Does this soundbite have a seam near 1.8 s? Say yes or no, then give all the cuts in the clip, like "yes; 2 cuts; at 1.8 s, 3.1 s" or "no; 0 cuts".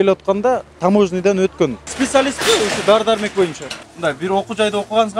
yes; 2 cuts; at 1.8 s, 3.8 s